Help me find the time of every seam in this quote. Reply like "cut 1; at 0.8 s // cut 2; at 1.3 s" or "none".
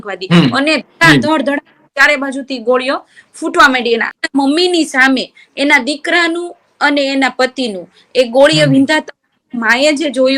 cut 1; at 4.1 s